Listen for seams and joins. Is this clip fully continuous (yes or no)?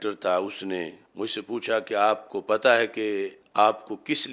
no